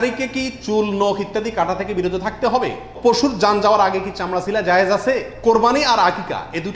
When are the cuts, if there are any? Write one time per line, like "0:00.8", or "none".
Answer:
0:02.9
0:05.3